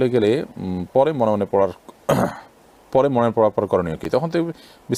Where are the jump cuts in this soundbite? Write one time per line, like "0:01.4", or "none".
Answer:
none